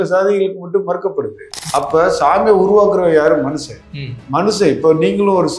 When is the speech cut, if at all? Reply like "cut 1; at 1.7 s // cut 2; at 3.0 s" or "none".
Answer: cut 1; at 1.6 s